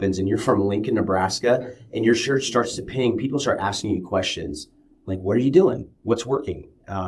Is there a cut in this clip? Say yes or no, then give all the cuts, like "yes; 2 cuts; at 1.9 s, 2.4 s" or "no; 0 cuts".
no; 0 cuts